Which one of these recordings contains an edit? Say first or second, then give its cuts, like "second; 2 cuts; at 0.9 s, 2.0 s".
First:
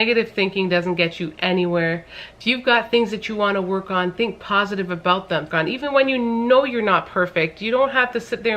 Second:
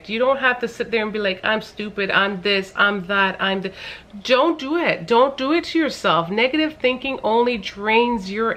first; 1 cut; at 5.5 s